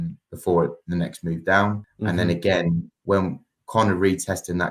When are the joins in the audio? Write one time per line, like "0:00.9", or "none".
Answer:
0:01.9